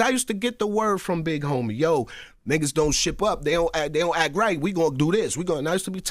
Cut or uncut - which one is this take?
cut